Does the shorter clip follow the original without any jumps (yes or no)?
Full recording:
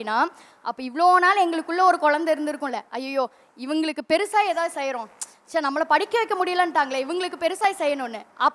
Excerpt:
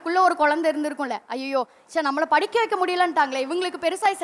no